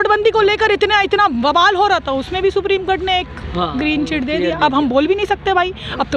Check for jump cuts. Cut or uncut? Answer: uncut